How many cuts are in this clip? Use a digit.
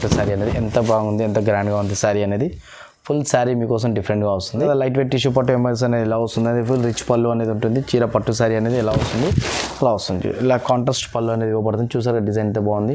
1